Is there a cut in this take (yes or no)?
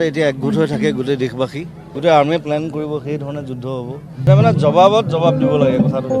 yes